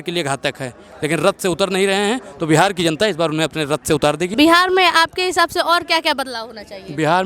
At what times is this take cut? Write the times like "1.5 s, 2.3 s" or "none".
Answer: 4.3 s